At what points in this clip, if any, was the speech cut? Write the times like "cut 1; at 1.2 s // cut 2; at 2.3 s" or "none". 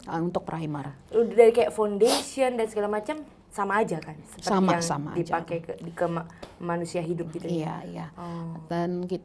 none